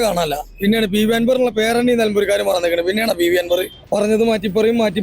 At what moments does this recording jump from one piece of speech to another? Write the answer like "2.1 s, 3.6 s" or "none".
3.8 s